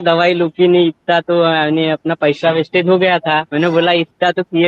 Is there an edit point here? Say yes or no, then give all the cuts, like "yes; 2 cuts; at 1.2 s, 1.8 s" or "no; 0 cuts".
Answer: yes; 1 cut; at 3.5 s